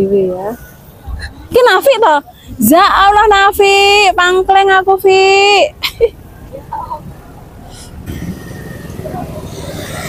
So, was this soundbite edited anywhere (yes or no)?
yes